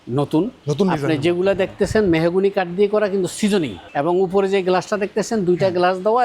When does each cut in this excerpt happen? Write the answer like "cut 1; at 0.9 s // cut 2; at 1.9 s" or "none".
cut 1; at 3.8 s